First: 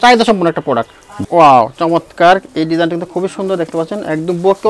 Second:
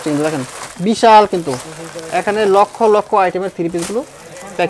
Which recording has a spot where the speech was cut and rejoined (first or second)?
first